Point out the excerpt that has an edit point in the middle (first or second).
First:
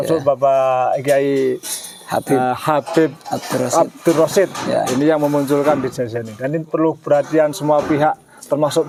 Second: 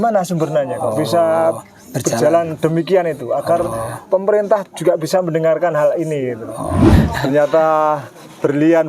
second